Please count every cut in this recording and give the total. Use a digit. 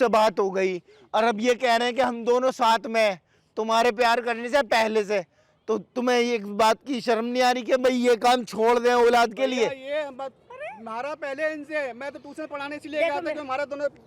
0